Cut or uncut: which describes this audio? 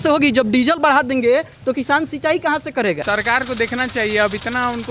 cut